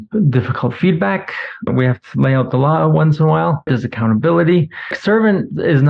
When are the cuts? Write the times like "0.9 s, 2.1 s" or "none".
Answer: 1.7 s, 3.7 s, 5.0 s